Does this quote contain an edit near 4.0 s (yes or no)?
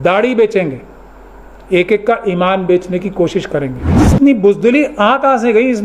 yes